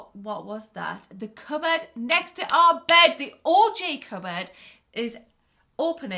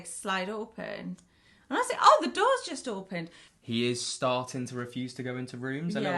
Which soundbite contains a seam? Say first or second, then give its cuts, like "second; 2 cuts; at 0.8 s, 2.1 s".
second; 1 cut; at 3.4 s